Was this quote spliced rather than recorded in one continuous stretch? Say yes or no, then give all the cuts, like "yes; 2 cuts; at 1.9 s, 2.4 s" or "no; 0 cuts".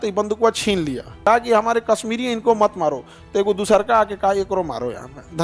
yes; 1 cut; at 1.2 s